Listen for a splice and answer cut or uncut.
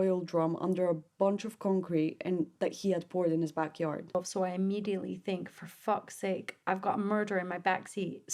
cut